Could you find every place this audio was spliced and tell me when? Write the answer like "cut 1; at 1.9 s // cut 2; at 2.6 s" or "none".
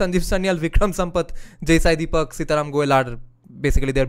none